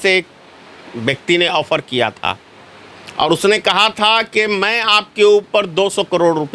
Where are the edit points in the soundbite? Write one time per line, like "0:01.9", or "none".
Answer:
none